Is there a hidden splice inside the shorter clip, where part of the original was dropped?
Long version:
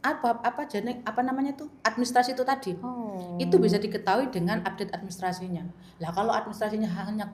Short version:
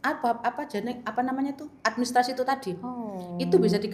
no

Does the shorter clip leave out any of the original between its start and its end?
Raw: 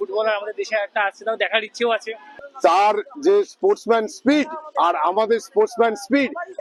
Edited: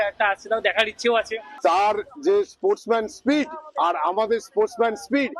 yes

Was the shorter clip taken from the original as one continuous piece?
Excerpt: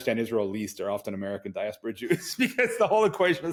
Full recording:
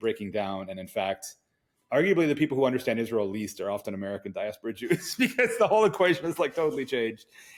yes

